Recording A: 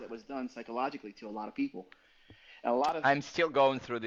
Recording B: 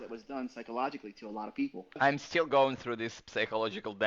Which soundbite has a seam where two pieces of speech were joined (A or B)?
B